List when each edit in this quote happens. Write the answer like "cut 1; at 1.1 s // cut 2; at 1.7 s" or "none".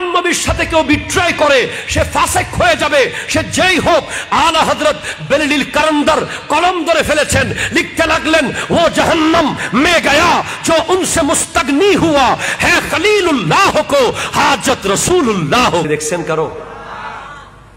cut 1; at 15.8 s